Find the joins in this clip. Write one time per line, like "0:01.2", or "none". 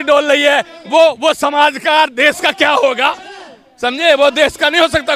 none